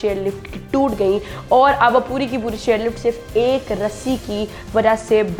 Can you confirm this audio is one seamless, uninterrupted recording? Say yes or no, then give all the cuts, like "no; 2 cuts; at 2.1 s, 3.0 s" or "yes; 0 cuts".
yes; 0 cuts